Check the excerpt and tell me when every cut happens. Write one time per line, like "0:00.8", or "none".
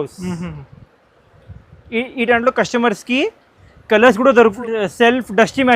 0:04.4